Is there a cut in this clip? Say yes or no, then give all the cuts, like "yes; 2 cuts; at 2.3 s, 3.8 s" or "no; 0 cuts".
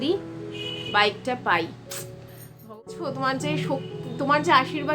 yes; 1 cut; at 2.7 s